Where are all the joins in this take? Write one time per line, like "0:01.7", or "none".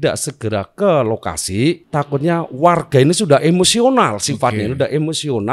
0:01.8